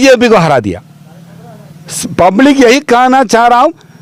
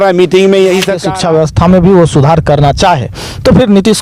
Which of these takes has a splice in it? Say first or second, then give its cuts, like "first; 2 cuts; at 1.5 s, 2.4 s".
second; 1 cut; at 1.1 s